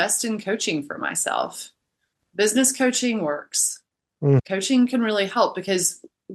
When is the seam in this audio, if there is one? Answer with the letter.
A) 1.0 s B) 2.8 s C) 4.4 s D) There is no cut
C